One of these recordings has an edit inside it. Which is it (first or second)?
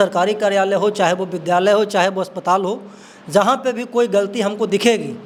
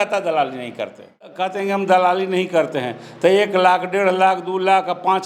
second